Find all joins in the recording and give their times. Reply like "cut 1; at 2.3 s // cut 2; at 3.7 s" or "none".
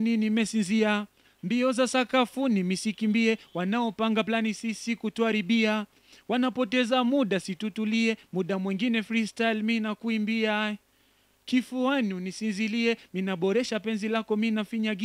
none